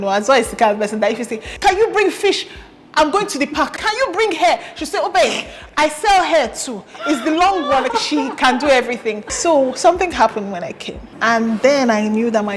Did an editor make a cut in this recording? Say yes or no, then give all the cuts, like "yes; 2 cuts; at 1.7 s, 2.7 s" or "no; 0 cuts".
yes; 5 cuts; at 1.5 s, 3.8 s, 7.9 s, 9.3 s, 11.1 s